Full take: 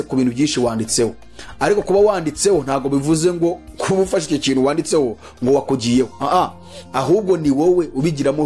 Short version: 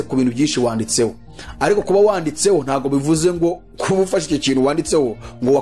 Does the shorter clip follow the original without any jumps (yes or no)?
yes